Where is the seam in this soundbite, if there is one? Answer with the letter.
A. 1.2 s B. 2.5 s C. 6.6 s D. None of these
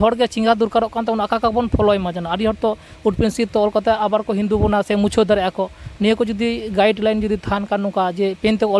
D